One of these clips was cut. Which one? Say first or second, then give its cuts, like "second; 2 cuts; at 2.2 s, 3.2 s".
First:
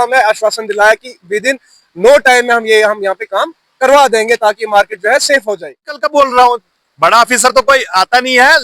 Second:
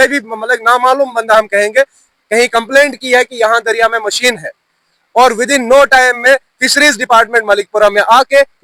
first; 1 cut; at 5.9 s